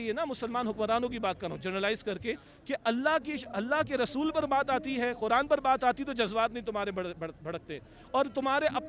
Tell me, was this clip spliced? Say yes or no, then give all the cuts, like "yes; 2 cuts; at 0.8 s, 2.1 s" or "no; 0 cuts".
no; 0 cuts